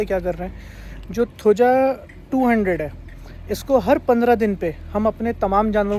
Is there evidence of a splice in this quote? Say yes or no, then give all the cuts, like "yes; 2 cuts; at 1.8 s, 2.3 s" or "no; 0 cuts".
no; 0 cuts